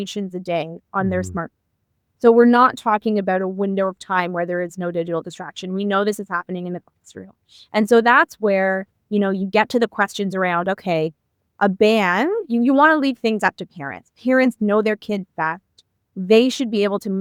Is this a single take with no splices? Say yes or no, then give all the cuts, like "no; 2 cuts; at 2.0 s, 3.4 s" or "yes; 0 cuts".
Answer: yes; 0 cuts